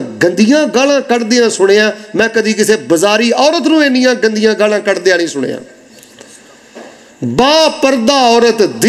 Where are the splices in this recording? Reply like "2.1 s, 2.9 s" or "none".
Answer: none